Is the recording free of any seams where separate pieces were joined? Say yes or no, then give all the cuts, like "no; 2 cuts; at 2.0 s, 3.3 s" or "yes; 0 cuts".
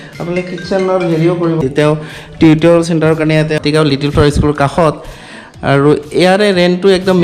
no; 2 cuts; at 1.6 s, 3.6 s